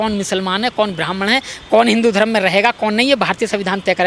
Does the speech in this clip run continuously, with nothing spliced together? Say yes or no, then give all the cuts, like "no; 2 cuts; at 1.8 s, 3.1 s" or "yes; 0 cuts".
yes; 0 cuts